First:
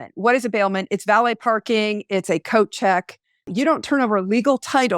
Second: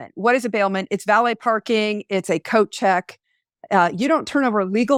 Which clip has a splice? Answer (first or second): first